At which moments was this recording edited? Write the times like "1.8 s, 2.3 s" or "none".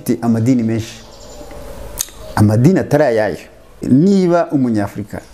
3.8 s